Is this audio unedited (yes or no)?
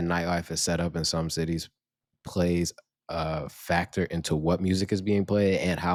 yes